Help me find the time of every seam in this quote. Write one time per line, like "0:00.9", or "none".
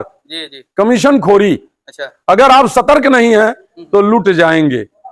none